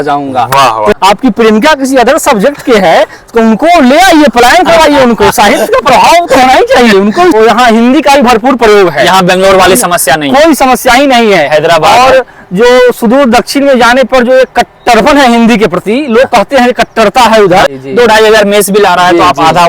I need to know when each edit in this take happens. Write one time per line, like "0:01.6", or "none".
0:00.9
0:07.3
0:17.8